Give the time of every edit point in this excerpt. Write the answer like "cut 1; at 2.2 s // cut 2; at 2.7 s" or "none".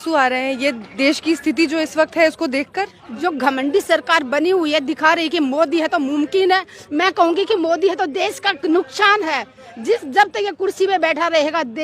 cut 1; at 3.0 s